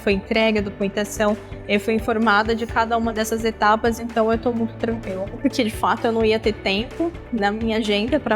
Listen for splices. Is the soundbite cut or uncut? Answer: cut